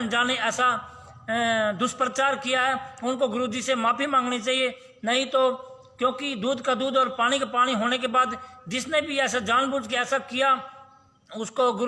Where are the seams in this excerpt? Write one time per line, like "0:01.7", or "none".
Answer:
none